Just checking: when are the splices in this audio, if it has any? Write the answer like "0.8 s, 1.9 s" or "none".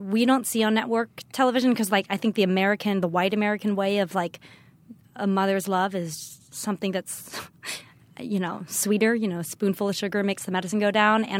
none